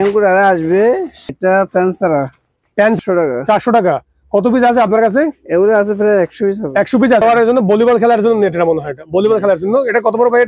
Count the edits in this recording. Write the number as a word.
three